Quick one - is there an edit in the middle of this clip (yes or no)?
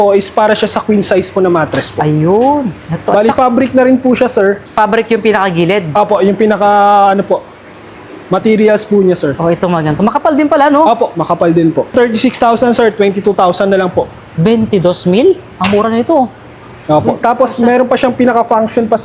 no